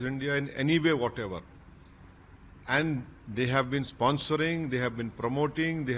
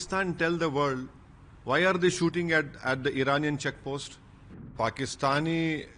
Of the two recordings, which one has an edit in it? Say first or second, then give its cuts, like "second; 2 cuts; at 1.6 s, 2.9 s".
second; 1 cut; at 4.7 s